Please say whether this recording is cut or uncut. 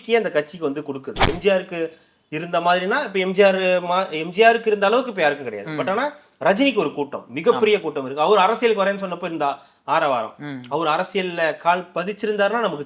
cut